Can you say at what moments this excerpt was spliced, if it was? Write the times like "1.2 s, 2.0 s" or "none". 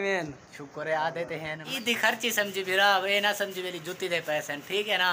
1.6 s

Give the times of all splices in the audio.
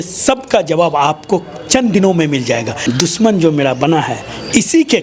2.8 s

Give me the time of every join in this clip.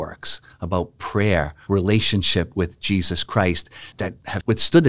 1.6 s, 3.9 s

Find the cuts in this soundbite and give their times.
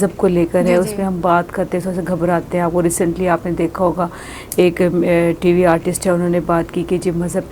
none

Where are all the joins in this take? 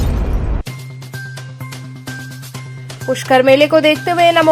2.4 s

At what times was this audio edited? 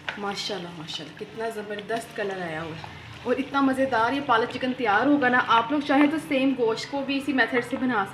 none

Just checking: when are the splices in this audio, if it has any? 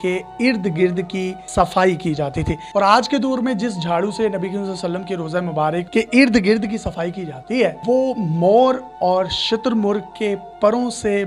2.6 s, 5.9 s, 7.8 s

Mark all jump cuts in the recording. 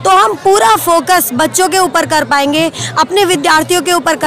none

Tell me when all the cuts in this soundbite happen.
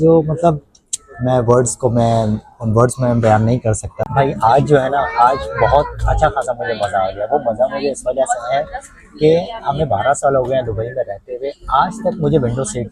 3.9 s

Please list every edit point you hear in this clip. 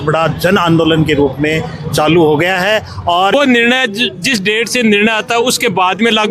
3.3 s

